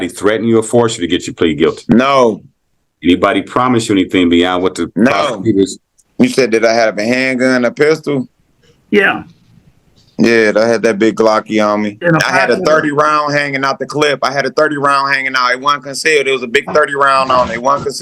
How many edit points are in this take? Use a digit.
2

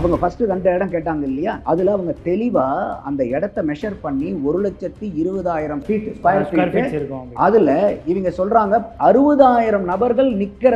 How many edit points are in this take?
1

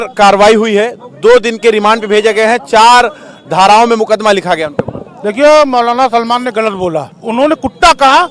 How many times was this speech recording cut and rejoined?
1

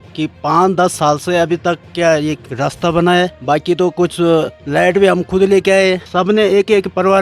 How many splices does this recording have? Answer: 3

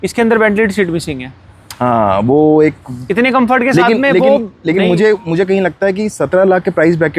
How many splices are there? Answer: 0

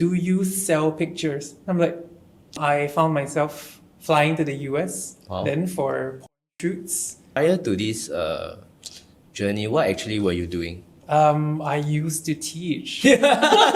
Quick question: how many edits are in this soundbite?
3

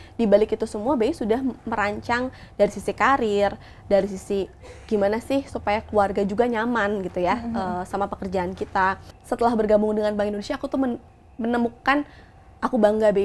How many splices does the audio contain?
1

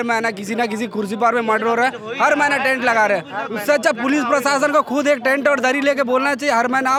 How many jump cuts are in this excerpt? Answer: 0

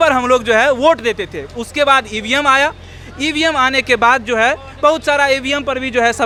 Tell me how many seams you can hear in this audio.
0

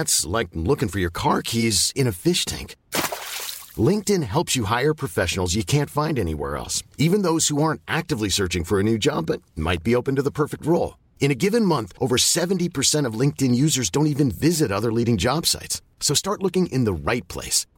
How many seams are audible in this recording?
0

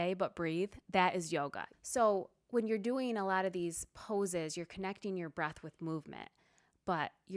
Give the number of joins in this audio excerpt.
1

